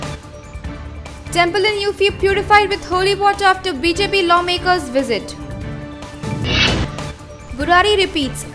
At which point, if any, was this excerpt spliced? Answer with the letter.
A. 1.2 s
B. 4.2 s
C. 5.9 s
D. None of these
D